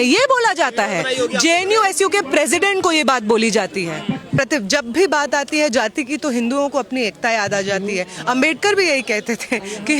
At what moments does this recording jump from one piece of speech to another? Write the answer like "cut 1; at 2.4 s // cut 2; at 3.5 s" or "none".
cut 1; at 4.4 s

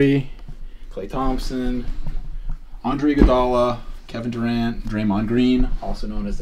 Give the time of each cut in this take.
none

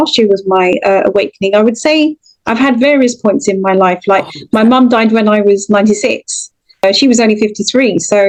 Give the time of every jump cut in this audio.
none

